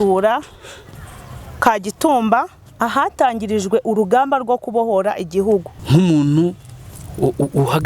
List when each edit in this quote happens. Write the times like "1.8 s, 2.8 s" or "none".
5.8 s